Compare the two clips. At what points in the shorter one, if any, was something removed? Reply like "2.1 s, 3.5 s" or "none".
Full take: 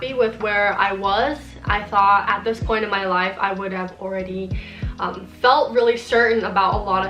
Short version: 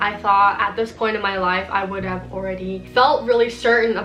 2.8 s